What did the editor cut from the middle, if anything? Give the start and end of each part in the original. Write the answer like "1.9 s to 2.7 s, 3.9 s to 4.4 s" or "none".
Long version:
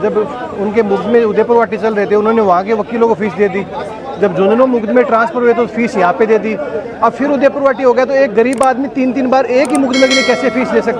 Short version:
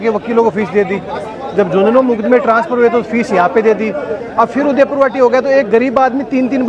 none